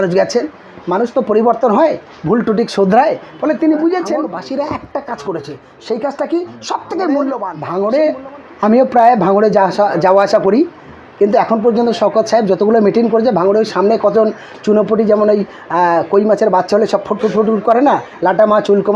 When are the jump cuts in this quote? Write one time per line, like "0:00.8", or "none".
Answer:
0:04.2
0:07.6